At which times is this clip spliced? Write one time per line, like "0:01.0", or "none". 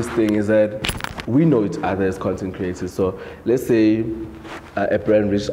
none